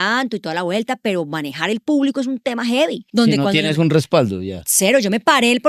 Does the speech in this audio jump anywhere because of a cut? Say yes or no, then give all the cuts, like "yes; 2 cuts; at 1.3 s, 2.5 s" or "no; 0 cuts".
yes; 1 cut; at 3.0 s